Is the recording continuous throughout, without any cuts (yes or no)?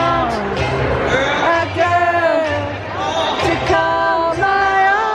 yes